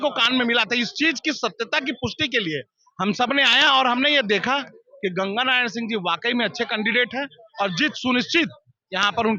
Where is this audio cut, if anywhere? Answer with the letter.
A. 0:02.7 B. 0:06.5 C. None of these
C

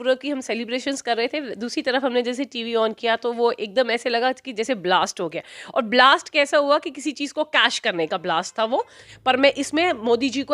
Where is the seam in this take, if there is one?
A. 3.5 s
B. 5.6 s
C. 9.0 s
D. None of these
C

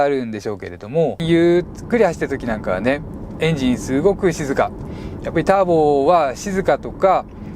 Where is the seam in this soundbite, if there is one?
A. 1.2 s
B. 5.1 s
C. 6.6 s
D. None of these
A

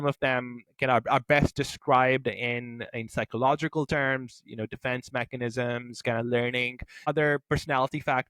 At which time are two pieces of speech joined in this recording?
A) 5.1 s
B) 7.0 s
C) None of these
B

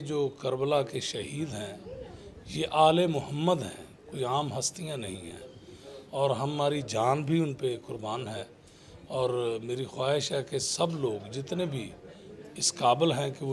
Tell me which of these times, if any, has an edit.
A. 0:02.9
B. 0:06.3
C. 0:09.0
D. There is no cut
D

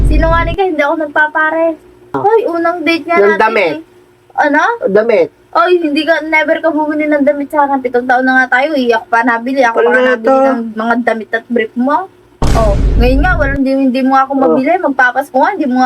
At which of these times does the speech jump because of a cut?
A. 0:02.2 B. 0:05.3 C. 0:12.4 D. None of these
A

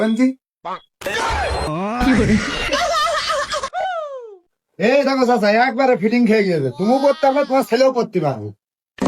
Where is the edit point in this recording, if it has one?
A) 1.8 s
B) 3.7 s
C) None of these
B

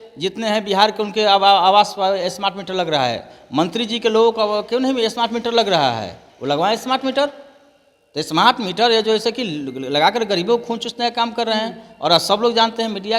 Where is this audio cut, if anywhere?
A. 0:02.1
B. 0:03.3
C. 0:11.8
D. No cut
D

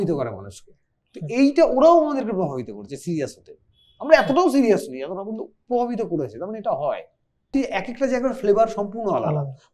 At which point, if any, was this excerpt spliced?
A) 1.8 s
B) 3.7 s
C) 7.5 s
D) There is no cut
C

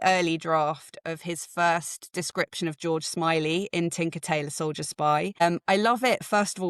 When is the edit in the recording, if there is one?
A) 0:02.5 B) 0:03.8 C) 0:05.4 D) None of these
C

